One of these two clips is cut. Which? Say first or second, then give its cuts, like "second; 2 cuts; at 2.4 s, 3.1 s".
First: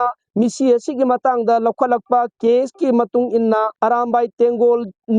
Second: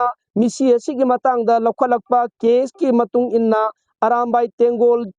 first; 1 cut; at 3.7 s